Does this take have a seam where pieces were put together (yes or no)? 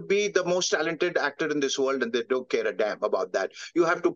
no